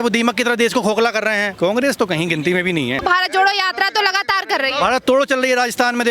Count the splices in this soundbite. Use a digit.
2